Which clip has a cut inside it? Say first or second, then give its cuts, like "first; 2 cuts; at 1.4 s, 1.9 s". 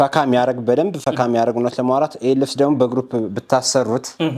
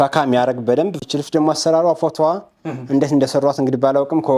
second; 1 cut; at 1.0 s